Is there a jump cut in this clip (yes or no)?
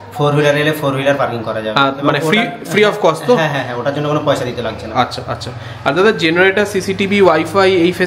no